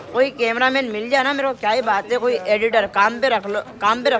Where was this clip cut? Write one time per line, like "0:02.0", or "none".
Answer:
none